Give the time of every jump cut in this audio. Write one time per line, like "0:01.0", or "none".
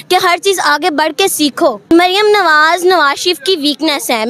0:01.9